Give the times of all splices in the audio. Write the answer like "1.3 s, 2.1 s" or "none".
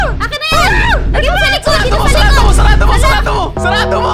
none